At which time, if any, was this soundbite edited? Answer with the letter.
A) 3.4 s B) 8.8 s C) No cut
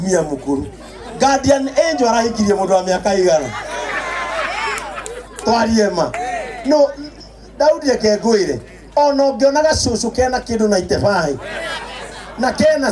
C